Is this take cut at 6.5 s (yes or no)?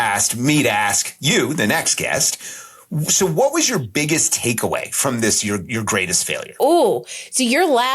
yes